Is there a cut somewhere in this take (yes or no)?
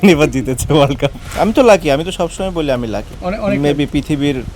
yes